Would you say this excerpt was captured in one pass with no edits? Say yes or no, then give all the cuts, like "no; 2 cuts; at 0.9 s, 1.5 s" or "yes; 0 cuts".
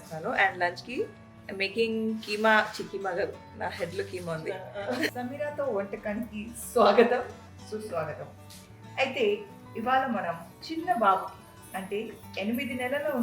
no; 1 cut; at 5.1 s